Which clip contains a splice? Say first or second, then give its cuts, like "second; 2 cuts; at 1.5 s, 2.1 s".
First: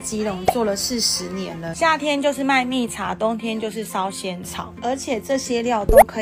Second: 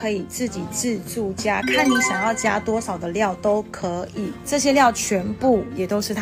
second; 1 cut; at 4.4 s